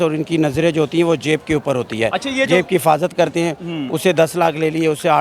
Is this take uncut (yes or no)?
yes